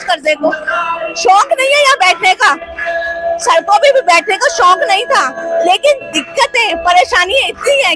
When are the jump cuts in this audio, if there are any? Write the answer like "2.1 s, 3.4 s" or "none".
none